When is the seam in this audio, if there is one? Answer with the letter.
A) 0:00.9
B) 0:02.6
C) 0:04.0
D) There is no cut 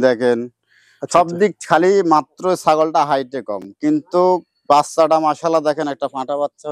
D